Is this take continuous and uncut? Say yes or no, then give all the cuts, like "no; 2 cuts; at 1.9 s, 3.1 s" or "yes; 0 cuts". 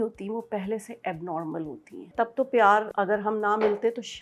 no; 2 cuts; at 2.1 s, 2.9 s